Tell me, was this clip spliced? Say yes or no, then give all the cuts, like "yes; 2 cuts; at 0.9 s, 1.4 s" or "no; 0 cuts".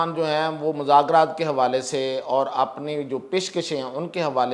no; 0 cuts